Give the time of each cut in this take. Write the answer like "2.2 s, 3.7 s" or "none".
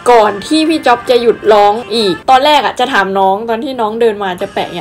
2.2 s